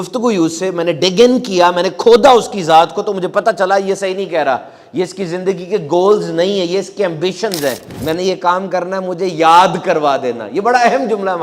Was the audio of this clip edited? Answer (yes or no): yes